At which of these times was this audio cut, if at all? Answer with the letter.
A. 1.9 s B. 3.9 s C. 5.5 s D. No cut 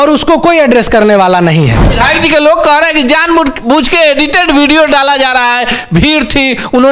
A